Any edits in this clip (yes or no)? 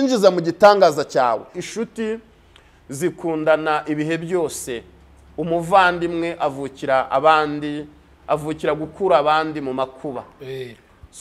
yes